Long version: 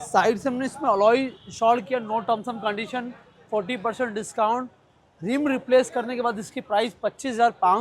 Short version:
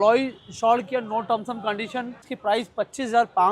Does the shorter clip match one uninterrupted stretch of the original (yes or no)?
no